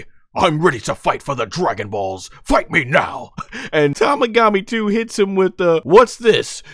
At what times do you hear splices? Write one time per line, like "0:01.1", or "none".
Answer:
0:03.9
0:05.8

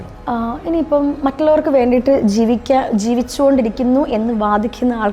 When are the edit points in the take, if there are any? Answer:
none

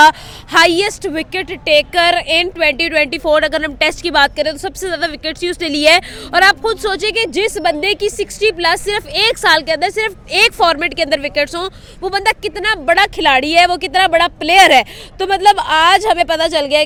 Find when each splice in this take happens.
none

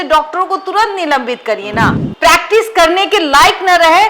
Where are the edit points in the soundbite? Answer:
0:02.0

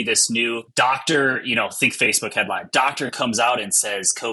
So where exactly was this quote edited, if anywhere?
none

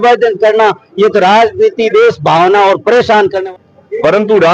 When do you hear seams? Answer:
0:03.4

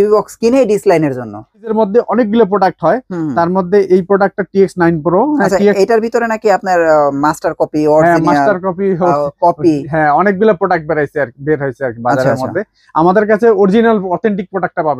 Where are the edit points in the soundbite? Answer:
0:01.7

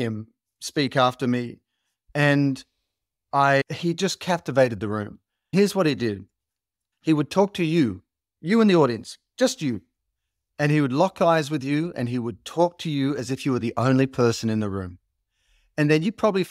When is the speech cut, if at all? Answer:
0:03.6
0:05.5

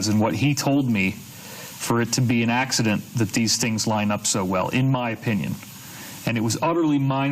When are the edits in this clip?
0:03.7

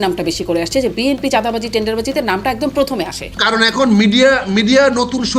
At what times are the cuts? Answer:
0:03.3

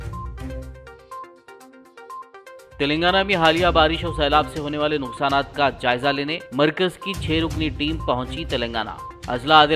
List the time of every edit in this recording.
none

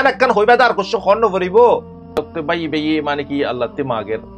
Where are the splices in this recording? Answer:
0:02.1

